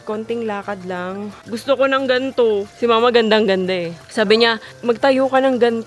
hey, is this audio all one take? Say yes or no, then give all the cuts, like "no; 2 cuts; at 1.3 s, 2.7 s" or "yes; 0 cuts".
no; 3 cuts; at 1.4 s, 2.7 s, 4.0 s